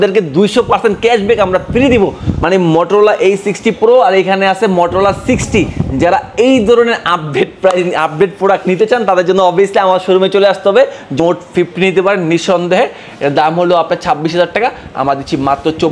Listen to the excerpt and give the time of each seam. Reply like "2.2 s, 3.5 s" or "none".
2.3 s, 11.2 s

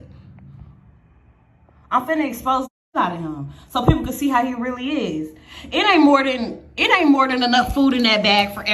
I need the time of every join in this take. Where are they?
6.2 s

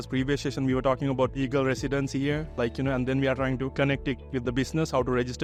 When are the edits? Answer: none

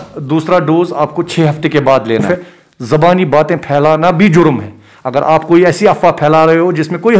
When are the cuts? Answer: 2.3 s

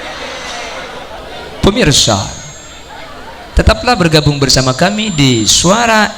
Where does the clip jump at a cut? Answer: 1.2 s

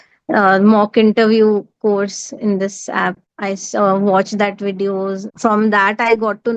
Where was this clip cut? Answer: 3.3 s, 5.3 s

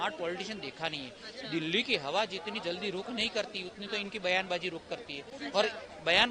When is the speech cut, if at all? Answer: none

